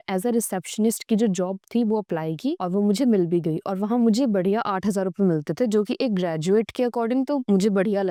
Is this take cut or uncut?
uncut